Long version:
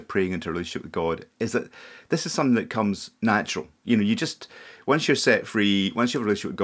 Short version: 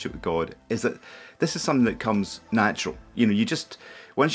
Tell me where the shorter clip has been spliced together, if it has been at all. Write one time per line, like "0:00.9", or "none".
none